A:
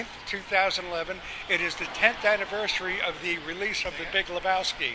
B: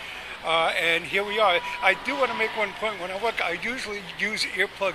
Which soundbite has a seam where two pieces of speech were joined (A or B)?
B